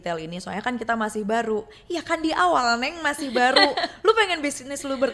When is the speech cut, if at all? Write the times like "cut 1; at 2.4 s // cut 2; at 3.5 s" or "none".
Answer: none